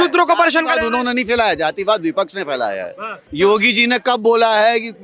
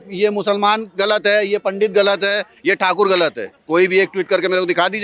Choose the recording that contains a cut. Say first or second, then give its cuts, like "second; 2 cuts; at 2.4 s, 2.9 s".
first; 1 cut; at 3.2 s